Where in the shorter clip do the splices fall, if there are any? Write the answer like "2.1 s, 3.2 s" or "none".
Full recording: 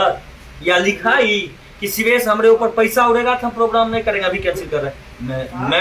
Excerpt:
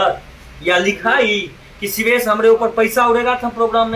none